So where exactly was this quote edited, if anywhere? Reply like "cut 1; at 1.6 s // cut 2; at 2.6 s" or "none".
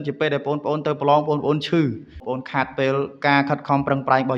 cut 1; at 2.2 s